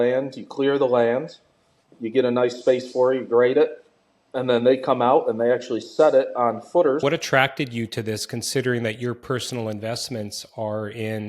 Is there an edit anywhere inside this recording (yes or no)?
yes